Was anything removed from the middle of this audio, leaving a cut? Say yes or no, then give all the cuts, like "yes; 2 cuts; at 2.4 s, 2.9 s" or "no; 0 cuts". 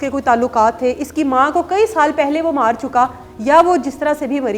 no; 0 cuts